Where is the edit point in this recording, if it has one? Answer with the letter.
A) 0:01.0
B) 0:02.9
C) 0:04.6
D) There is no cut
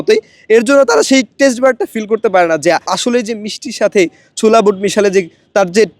B